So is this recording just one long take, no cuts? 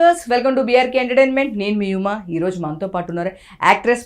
yes; 0 cuts

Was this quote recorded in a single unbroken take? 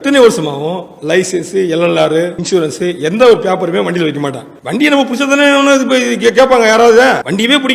yes; 0 cuts

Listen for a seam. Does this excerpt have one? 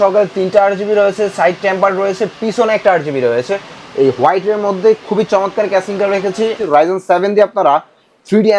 yes; 1 cut; at 6.7 s

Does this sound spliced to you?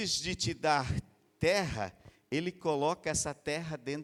no; 0 cuts

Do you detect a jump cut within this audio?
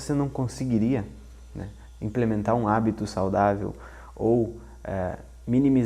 no; 0 cuts

